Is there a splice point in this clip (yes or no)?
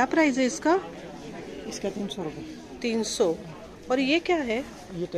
no